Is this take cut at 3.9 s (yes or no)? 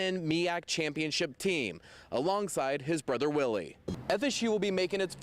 yes